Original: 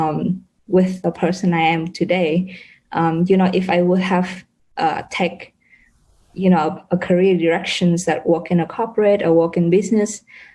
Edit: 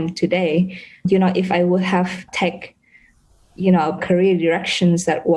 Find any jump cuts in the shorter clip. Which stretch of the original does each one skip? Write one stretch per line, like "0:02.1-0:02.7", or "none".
0:02.8-0:03.2
0:04.5-0:05.1
0:06.8-0:07.0